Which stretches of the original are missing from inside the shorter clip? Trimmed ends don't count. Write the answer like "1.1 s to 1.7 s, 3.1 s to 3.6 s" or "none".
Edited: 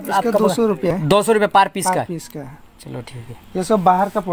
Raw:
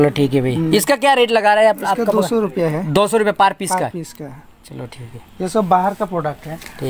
2.7 s to 2.8 s